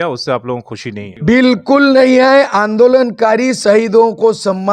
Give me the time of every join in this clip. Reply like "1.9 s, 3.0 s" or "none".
1.1 s